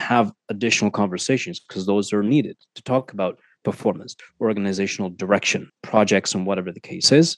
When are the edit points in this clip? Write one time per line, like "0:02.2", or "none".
0:04.1
0:05.8